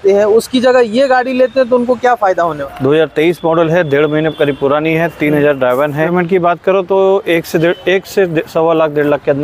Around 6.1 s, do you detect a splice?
yes; 2 cuts; at 2.6 s, 6.1 s

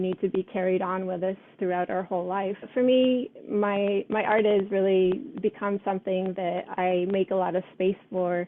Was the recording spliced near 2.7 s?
yes; 1 cut; at 2.7 s

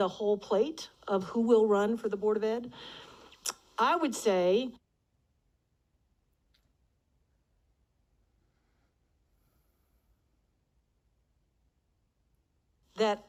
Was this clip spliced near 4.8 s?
no; 0 cuts

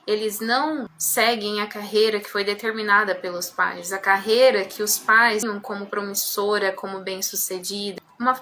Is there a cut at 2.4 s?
no; 2 cuts; at 1.0 s, 5.4 s

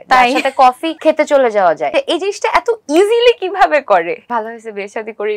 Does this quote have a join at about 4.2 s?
yes; 3 cuts; at 0.9 s, 1.9 s, 4.2 s

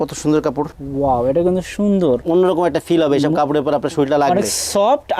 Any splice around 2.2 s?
yes; 1 cut; at 2.2 s

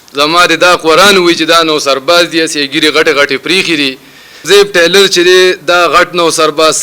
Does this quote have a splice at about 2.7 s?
no; 1 cut; at 4.4 s

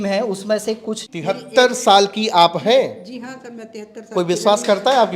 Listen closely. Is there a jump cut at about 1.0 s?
yes; 1 cut; at 1.0 s

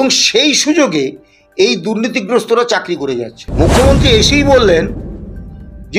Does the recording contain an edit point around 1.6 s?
no; 1 cut; at 3.4 s

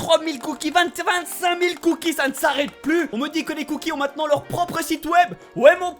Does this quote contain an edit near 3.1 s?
yes; 1 cut; at 3.1 s

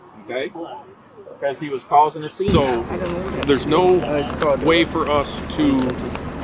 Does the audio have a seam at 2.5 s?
yes; 1 cut; at 2.5 s

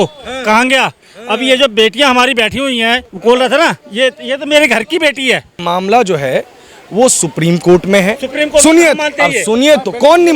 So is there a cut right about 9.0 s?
no; 2 cuts; at 3.1 s, 5.6 s

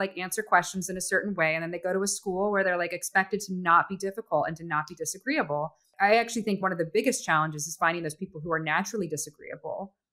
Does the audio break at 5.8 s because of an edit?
yes; 1 cut; at 5.8 s

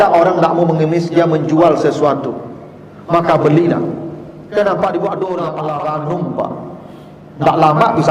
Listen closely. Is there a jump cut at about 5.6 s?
yes; 1 cut; at 5.6 s

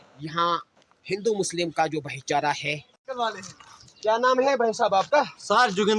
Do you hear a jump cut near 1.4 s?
no; 1 cut; at 3.0 s

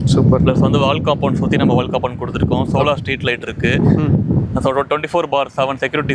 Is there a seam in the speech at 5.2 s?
no; 0 cuts

